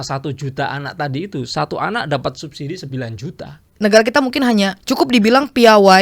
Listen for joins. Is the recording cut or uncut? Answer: cut